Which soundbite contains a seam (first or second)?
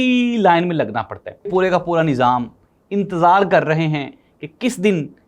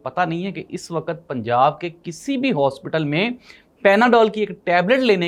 first